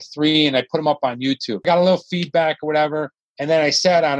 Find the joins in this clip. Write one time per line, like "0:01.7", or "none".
0:01.6